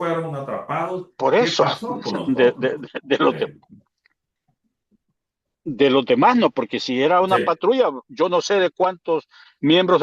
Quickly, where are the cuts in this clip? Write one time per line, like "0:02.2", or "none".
none